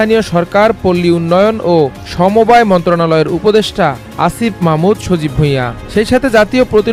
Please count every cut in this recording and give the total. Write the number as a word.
zero